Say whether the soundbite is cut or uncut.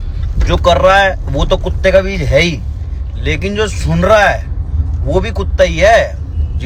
uncut